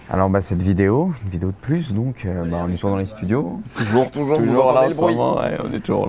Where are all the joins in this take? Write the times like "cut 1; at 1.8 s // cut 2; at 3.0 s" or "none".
cut 1; at 2.4 s

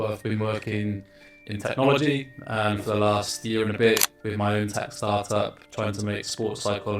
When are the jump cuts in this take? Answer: none

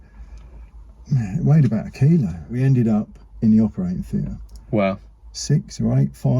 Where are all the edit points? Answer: cut 1; at 2.5 s

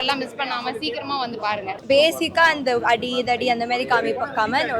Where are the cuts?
cut 1; at 1.7 s

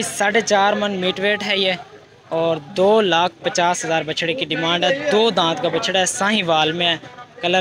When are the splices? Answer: none

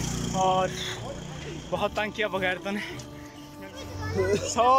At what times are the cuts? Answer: cut 1; at 3.4 s

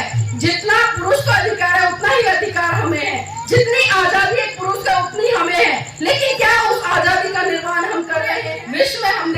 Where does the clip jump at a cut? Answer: cut 1; at 8.4 s

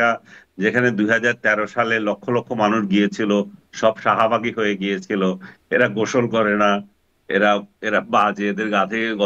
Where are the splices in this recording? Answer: none

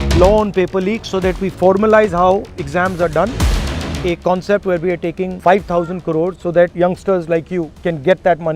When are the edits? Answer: cut 1; at 3.7 s // cut 2; at 5.3 s // cut 3; at 6.6 s // cut 4; at 7.7 s

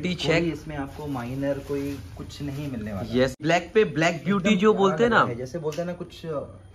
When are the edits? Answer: cut 1; at 3.4 s

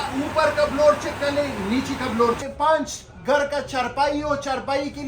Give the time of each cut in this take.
cut 1; at 2.4 s

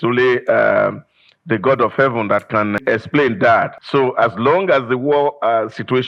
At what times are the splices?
cut 1; at 2.8 s // cut 2; at 3.8 s

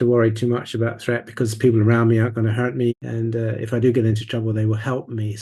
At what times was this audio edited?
cut 1; at 2.9 s

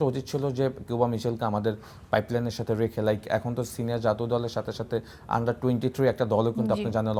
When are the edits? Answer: none

